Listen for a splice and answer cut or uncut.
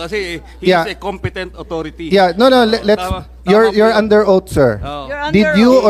uncut